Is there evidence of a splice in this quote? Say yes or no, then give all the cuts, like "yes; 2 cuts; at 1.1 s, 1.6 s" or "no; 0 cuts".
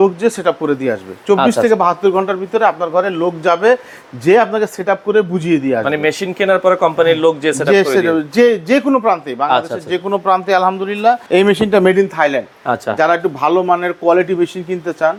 no; 0 cuts